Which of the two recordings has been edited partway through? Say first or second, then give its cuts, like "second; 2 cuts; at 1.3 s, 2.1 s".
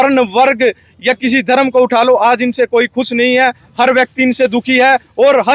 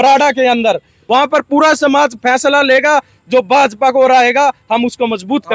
second; 1 cut; at 0.9 s